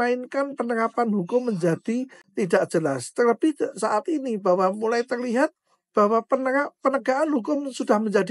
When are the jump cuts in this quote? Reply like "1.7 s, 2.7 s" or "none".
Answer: 2.2 s